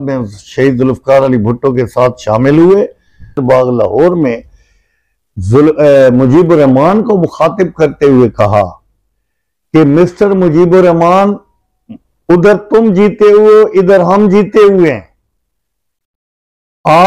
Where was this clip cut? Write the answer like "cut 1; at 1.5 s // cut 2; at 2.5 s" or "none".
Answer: cut 1; at 3.4 s